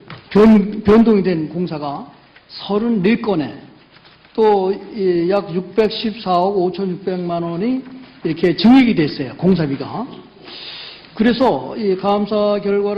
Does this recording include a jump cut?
no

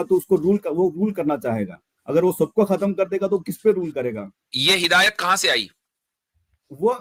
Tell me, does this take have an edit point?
no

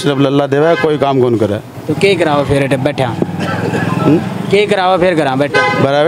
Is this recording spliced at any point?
no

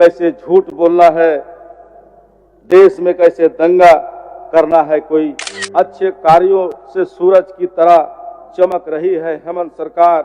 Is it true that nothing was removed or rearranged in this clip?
no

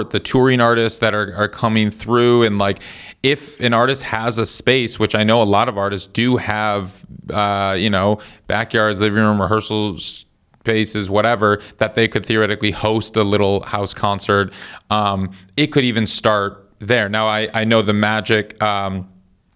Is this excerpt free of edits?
yes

